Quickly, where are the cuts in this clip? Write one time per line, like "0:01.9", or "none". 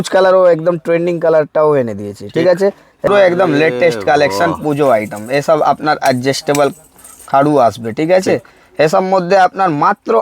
0:03.1